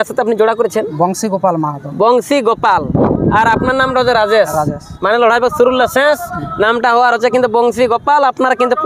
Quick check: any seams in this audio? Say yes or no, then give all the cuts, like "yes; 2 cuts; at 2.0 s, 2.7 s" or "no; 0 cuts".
no; 0 cuts